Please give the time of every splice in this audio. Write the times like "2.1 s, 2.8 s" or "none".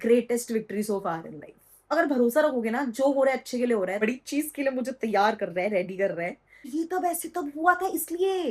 1.9 s, 4.0 s, 6.5 s